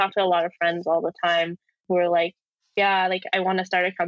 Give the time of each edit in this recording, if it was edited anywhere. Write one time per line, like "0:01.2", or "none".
0:01.8

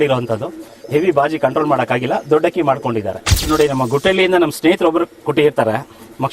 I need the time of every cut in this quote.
0:03.5

